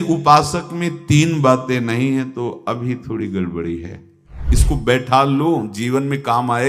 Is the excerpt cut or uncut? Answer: cut